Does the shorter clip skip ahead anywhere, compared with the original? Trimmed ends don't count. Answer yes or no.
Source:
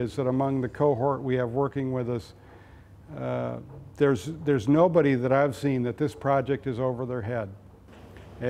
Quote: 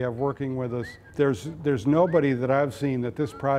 yes